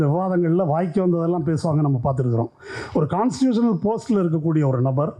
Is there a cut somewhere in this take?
no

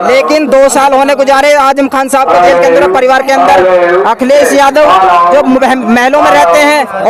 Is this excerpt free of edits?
yes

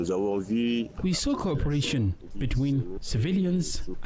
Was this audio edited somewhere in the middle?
yes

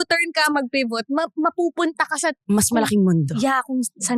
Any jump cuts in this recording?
no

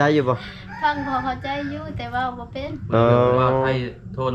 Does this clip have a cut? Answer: no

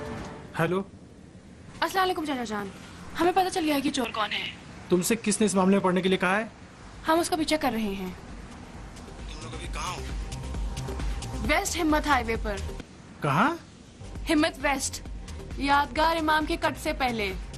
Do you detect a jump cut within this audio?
yes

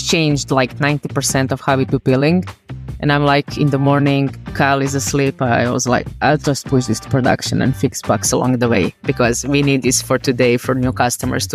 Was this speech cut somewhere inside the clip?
no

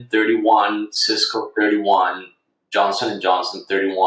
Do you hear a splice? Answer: no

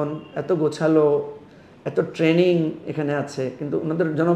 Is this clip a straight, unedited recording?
yes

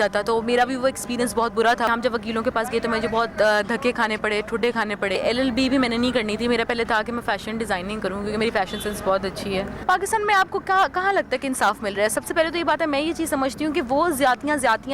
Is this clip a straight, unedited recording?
no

